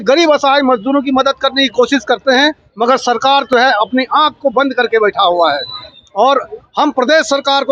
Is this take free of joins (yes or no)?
yes